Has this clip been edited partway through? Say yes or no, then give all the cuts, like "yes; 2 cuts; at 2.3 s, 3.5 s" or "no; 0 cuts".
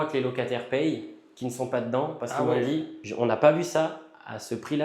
yes; 1 cut; at 3.0 s